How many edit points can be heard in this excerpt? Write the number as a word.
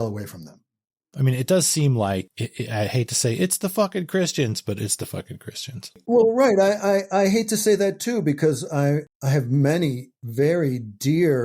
three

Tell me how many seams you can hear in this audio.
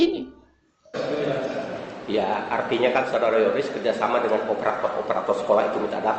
one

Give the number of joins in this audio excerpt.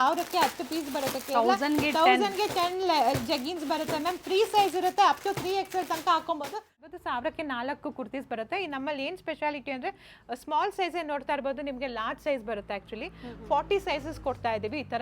one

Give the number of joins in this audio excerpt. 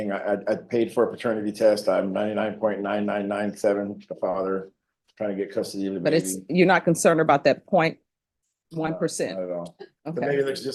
zero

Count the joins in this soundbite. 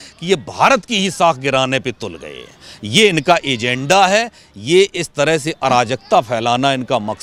zero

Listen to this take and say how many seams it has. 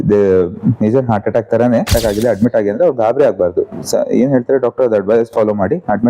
one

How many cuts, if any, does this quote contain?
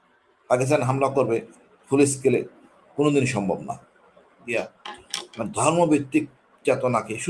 one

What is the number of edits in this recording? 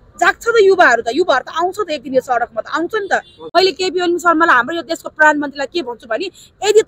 one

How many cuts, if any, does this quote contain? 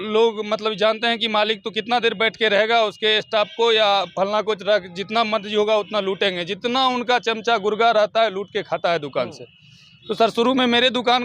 zero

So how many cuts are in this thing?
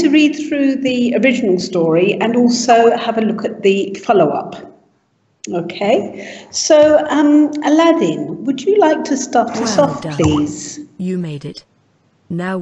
one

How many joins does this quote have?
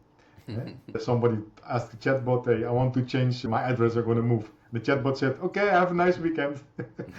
two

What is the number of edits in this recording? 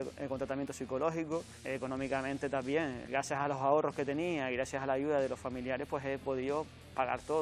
zero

